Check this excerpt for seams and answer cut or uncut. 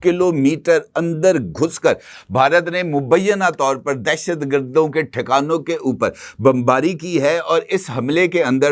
uncut